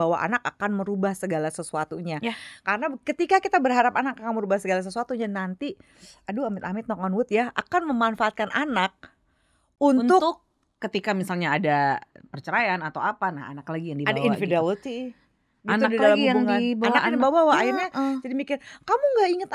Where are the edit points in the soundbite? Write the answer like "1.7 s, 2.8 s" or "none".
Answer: none